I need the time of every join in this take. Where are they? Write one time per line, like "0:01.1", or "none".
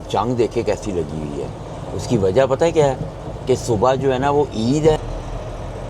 0:05.0